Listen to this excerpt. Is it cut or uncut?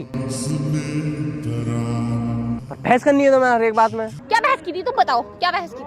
cut